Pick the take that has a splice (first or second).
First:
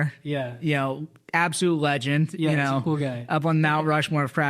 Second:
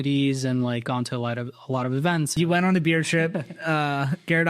second